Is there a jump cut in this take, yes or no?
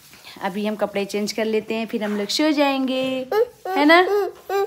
no